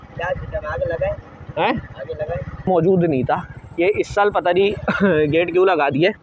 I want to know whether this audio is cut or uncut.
cut